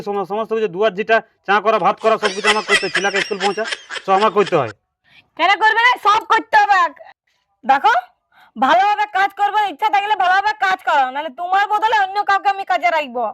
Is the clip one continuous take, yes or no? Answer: no